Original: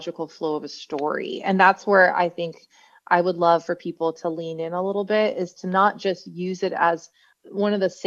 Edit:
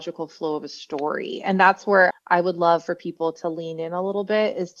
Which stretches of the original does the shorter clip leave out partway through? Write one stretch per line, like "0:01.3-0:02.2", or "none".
0:02.1-0:02.9